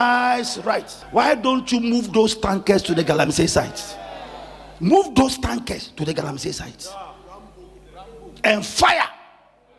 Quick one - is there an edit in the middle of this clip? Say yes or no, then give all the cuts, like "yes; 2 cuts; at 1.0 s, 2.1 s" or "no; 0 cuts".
yes; 1 cut; at 1.0 s